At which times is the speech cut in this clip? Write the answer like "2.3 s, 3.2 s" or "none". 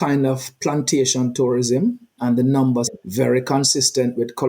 2.1 s, 2.9 s